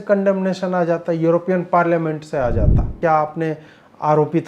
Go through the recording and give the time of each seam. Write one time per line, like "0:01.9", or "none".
0:02.9